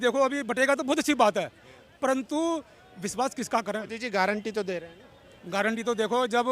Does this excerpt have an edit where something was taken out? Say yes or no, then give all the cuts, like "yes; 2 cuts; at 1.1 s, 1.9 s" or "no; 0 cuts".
yes; 1 cut; at 4.0 s